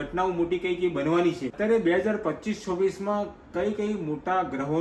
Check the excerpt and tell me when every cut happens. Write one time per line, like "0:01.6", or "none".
0:01.5